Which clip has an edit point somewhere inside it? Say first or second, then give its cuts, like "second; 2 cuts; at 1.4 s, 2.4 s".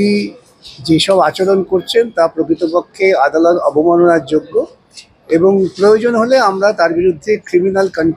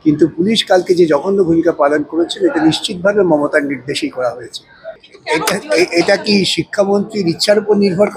second; 1 cut; at 5.0 s